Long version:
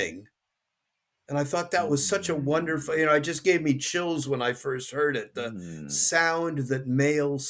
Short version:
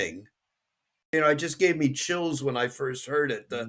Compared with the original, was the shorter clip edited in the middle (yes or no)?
yes